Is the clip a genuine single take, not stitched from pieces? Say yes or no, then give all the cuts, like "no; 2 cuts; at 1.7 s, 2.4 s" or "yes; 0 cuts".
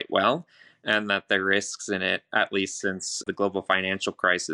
no; 1 cut; at 3.2 s